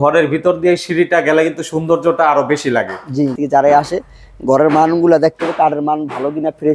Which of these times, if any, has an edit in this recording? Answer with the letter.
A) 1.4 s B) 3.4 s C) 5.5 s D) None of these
B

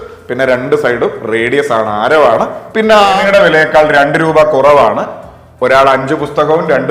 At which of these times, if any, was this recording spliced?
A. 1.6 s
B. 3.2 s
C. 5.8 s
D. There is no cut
B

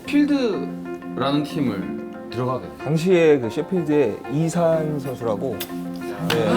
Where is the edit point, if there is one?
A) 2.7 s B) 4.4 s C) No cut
A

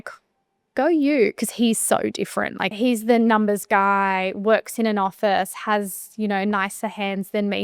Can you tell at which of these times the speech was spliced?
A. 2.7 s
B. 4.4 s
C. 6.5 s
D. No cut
A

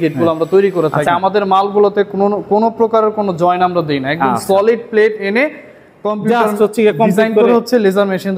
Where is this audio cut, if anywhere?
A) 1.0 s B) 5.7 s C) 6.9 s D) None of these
A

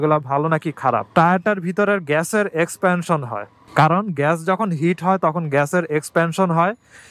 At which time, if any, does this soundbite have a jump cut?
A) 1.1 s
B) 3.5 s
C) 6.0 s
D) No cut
A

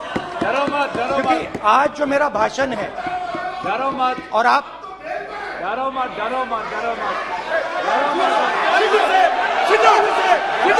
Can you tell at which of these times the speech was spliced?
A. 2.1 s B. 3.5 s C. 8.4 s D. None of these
D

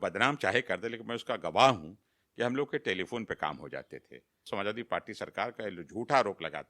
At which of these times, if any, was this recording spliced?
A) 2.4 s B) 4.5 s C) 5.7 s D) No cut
B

